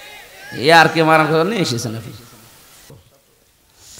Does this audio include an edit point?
yes; 1 cut; at 2.9 s

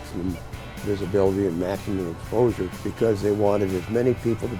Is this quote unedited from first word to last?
no; 1 cut; at 2.8 s

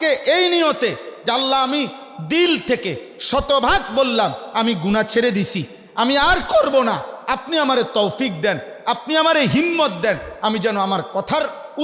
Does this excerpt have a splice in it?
no; 0 cuts

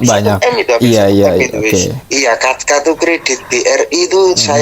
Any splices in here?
yes; 1 cut; at 2.0 s

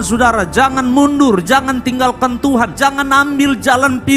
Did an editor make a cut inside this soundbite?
yes; 1 cut; at 2.7 s

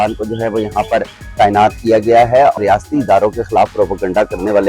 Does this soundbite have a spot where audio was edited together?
yes; 1 cut; at 2.6 s

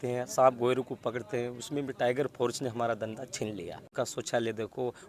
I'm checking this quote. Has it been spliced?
yes; 1 cut; at 3.9 s

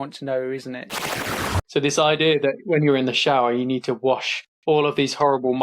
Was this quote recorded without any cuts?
no; 1 cut; at 1.0 s

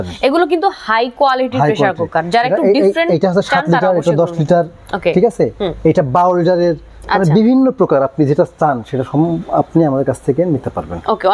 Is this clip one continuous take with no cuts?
yes; 0 cuts

